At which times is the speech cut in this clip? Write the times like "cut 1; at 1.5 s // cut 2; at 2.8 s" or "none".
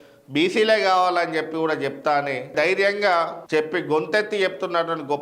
cut 1; at 2.5 s